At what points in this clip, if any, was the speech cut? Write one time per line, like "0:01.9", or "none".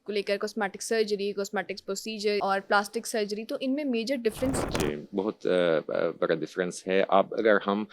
0:02.4
0:04.8

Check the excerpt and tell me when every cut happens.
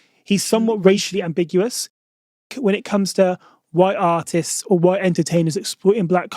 0:00.9
0:02.3

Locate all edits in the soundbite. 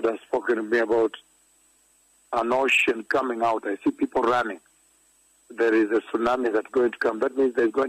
0:05.1

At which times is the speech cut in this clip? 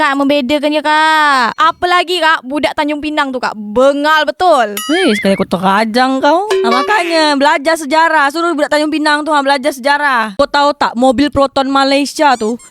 0:10.3

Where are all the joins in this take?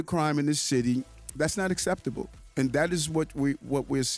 none

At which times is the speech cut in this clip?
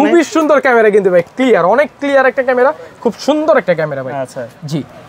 none

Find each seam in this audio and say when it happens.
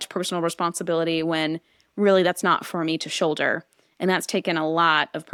none

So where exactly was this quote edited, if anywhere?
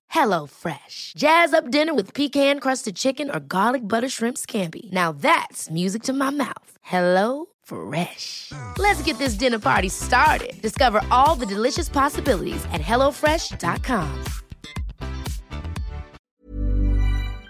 0:16.2

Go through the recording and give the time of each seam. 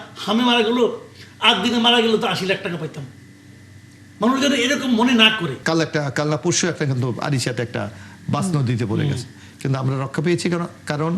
0:05.6

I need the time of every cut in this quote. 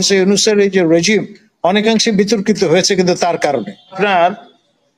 0:03.9

